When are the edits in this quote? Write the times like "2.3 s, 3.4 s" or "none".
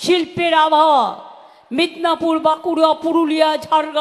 1.5 s